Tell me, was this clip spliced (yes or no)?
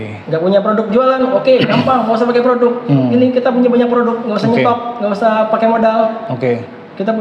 no